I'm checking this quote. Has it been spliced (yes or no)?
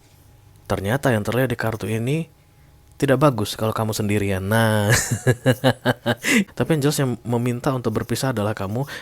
yes